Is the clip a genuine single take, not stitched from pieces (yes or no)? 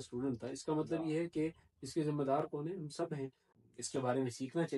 no